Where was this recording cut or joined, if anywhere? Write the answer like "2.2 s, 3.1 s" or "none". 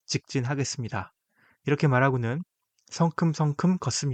none